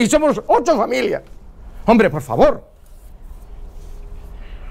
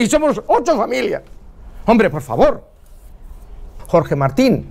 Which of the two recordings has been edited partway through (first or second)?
second